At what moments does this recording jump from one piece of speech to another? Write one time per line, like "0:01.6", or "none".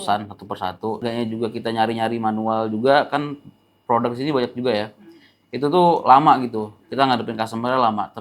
0:01.0